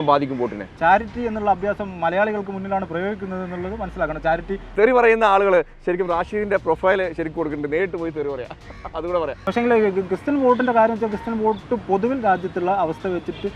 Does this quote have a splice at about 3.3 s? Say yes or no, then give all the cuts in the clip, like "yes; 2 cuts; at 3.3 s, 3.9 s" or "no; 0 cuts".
no; 2 cuts; at 4.6 s, 9.4 s